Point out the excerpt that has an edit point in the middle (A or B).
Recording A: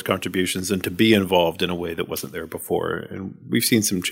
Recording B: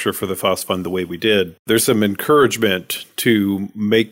B